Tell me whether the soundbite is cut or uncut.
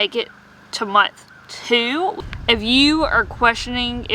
cut